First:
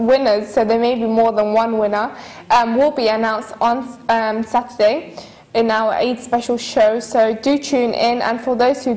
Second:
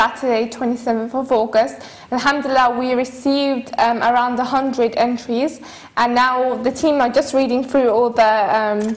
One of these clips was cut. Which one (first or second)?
second